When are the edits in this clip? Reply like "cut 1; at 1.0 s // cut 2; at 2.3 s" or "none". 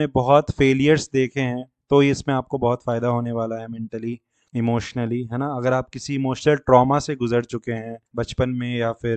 cut 1; at 4.3 s // cut 2; at 8.0 s